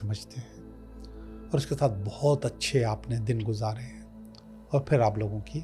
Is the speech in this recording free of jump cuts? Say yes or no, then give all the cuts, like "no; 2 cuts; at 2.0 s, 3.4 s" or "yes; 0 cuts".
yes; 0 cuts